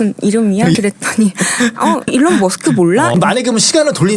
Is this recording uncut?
no; 2 cuts; at 2.1 s, 3.1 s

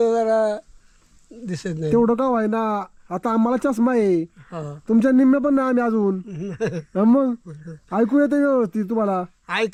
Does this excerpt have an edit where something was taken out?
no; 0 cuts

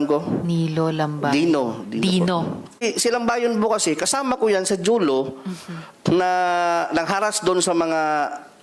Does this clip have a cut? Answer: yes; 1 cut; at 2.8 s

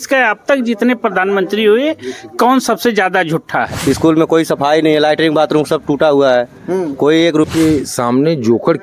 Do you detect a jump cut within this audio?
yes; 2 cuts; at 3.7 s, 7.5 s

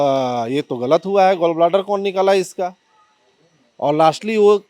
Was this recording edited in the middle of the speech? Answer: no; 0 cuts

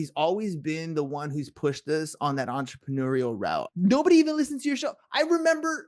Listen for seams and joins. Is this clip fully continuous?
no; 1 cut; at 3.7 s

